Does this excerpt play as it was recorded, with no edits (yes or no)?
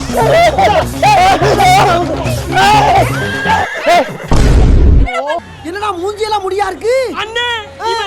no